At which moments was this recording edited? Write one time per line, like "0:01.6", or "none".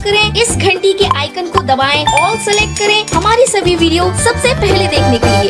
none